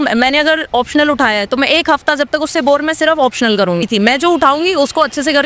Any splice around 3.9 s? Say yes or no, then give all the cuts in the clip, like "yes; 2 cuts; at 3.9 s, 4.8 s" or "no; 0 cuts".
yes; 1 cut; at 3.9 s